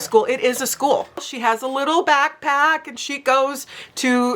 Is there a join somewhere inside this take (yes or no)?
yes